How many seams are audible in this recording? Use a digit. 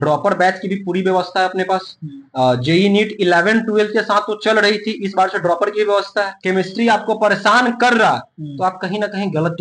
1